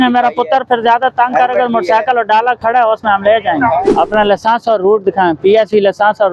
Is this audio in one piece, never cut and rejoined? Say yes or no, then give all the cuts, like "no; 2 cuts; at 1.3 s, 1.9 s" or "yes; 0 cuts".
no; 1 cut; at 3.8 s